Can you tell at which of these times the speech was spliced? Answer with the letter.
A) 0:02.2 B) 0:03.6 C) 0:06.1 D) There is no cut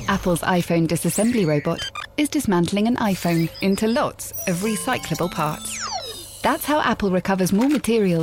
D